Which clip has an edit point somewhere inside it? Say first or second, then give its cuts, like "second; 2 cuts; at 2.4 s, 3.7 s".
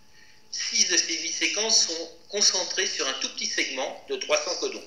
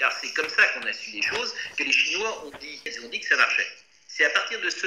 second; 1 cut; at 2.9 s